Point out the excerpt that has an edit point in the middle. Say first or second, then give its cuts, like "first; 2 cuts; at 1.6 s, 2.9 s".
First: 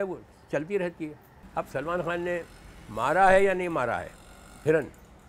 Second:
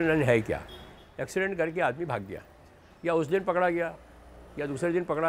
first; 1 cut; at 1.4 s